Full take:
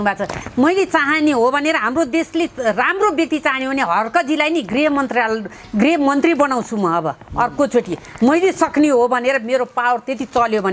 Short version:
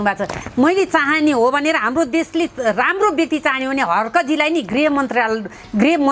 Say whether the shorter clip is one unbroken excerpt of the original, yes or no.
yes